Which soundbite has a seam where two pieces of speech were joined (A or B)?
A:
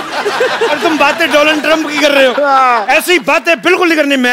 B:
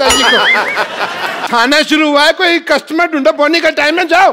B